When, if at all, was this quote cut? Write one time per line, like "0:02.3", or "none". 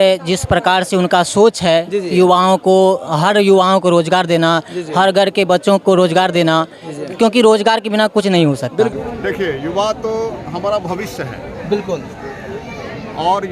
0:08.9